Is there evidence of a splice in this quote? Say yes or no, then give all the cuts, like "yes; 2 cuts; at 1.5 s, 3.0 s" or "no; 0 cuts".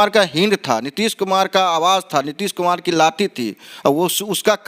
no; 0 cuts